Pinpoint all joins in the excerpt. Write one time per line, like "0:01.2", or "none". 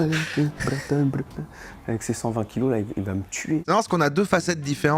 0:03.6